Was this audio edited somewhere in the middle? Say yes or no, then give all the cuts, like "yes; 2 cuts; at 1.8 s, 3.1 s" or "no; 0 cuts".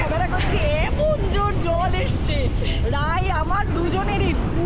no; 0 cuts